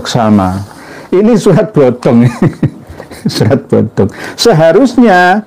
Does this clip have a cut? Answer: yes; 1 cut; at 1.2 s

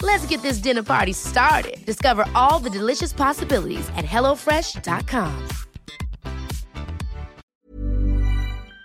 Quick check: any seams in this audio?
yes; 1 cut; at 7.4 s

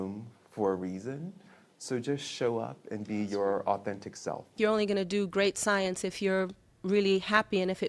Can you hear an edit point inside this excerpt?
yes; 1 cut; at 4.6 s

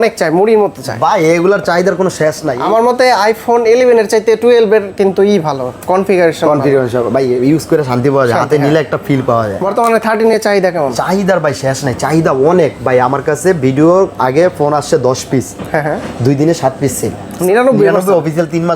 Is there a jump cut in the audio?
yes; 3 cuts; at 2.5 s, 9.6 s, 17.3 s

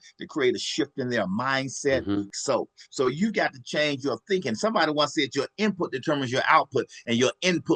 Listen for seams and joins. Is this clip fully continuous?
no; 1 cut; at 2.3 s

